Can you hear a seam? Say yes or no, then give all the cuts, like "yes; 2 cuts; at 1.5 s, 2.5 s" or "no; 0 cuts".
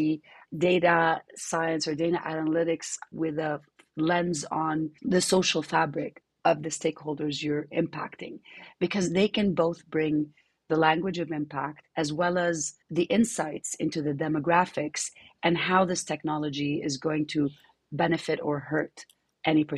no; 0 cuts